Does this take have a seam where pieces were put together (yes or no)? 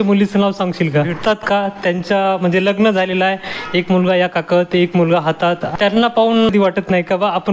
yes